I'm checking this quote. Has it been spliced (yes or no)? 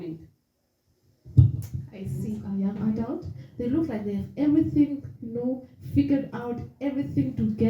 yes